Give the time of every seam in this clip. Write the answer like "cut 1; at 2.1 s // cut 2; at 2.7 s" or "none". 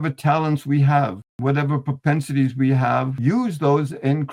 cut 1; at 1.3 s // cut 2; at 3.1 s